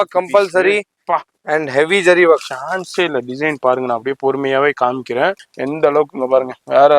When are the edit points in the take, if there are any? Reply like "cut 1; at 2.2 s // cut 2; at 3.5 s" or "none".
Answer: cut 1; at 5.5 s